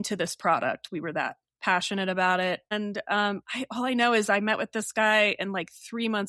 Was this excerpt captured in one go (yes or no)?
no